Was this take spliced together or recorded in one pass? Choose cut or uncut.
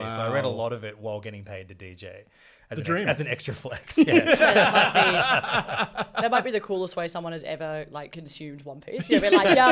uncut